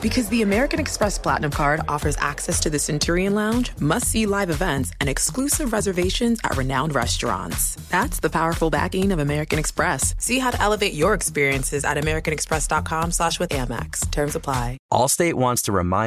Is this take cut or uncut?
cut